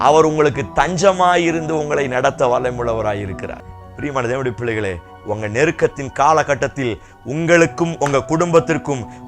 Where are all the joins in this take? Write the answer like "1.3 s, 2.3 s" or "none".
3.5 s